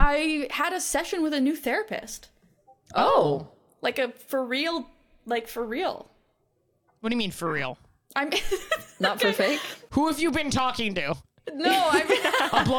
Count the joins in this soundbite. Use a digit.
1